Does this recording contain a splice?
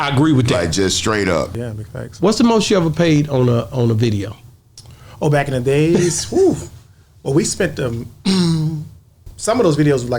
yes; 2 cuts; at 1.5 s, 9.3 s

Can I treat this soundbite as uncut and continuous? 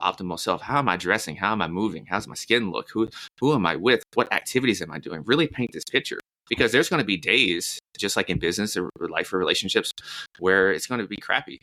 yes; 0 cuts

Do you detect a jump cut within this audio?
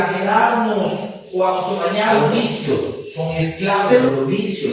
yes; 1 cut; at 2.2 s

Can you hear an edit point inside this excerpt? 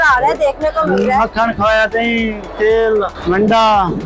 yes; 2 cuts; at 1.8 s, 3.2 s

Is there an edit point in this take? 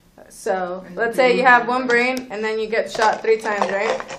yes; 1 cut; at 2.3 s

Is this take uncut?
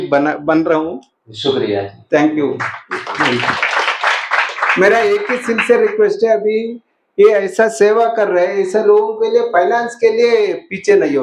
yes; 0 cuts

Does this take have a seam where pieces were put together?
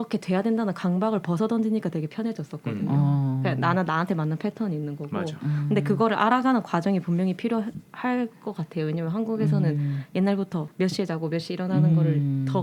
no; 0 cuts

